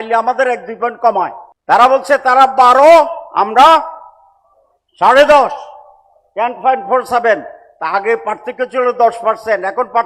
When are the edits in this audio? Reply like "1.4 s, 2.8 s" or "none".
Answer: 1.5 s